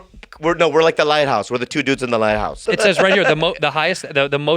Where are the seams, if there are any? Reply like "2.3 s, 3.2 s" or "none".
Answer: 2.6 s